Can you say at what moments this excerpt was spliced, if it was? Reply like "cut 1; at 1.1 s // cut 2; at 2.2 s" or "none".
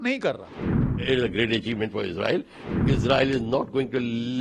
cut 1; at 1.0 s // cut 2; at 2.6 s